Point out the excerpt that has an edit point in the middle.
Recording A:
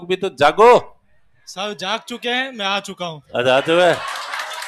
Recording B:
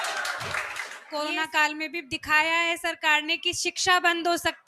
B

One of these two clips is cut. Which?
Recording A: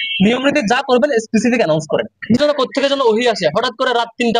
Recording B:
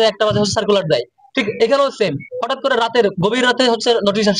A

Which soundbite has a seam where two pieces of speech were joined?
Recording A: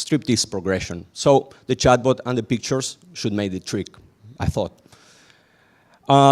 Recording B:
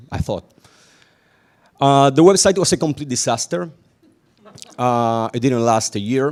A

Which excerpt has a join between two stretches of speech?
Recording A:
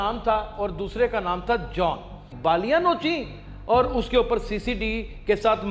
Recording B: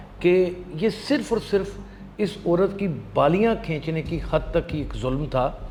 A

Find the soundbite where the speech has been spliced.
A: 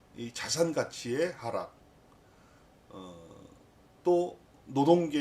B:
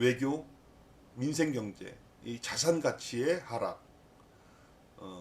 B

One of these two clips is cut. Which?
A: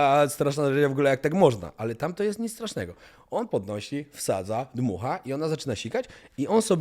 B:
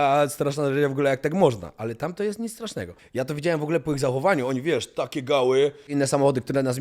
B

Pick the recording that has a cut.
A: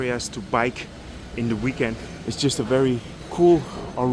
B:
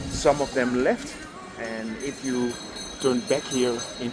A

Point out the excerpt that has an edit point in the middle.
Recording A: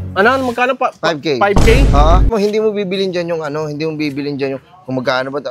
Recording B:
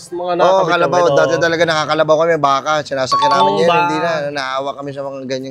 A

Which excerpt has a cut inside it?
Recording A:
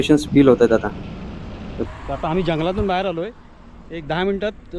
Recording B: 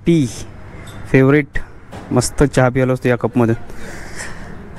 A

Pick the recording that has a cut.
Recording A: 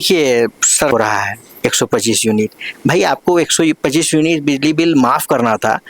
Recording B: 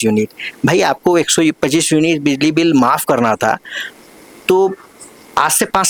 A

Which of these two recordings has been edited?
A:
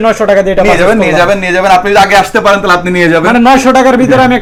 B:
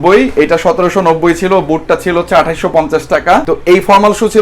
B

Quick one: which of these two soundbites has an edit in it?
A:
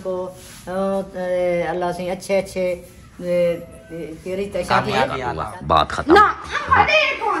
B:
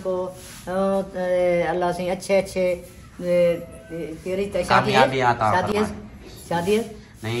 A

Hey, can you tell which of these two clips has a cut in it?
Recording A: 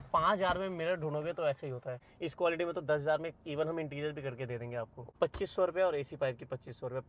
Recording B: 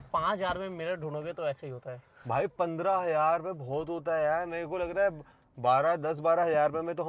A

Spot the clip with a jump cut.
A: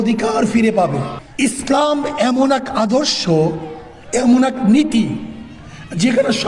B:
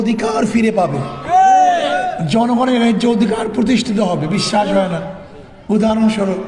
A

